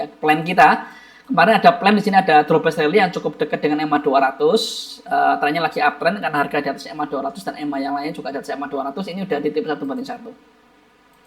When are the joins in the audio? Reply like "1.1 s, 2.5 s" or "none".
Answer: none